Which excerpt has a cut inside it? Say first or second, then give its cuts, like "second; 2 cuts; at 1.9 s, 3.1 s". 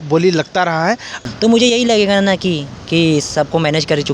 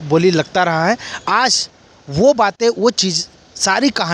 first; 1 cut; at 1.2 s